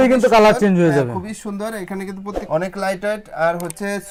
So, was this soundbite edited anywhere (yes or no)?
no